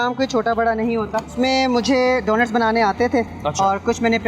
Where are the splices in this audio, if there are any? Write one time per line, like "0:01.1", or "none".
0:01.3

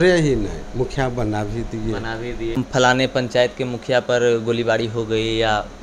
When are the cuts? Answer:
0:02.5

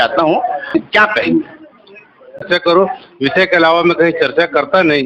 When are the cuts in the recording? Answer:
0:00.7
0:02.4

